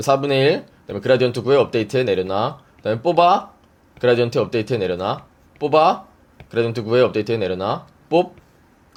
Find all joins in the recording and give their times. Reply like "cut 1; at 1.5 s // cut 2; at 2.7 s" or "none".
none